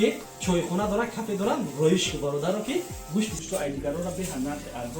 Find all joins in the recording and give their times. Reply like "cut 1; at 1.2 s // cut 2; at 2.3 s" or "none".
cut 1; at 3.4 s